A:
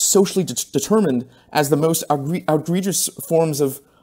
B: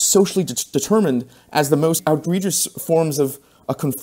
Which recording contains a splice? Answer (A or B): B